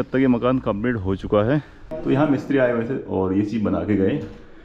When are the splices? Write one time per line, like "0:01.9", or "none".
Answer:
0:01.9